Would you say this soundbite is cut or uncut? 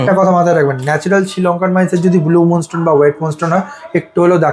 uncut